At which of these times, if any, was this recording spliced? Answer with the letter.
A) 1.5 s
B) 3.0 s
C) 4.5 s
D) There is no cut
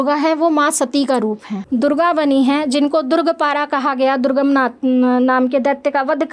A